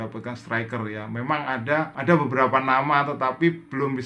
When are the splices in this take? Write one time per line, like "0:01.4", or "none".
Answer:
0:01.9

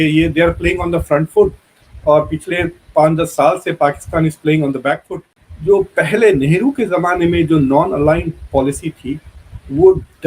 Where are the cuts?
0:05.4

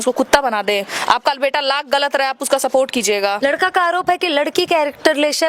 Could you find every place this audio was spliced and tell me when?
0:00.9
0:03.4

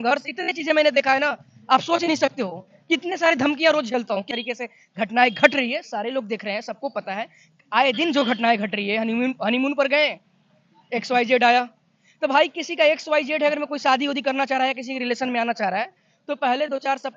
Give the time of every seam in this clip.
0:04.2

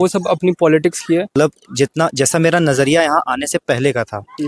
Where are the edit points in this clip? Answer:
0:01.3

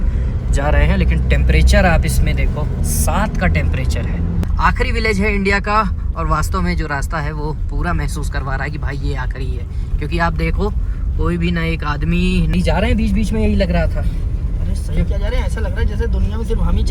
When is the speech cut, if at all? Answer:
0:04.4
0:12.5

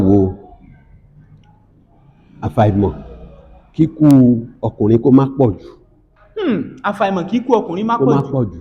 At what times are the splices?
none

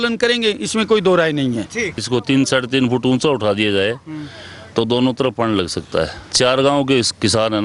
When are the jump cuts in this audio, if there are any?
0:02.0
0:06.2

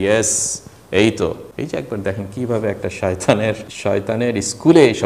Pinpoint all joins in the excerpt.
0:01.5

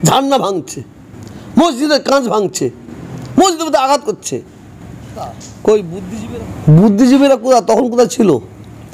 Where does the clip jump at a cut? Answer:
0:06.0

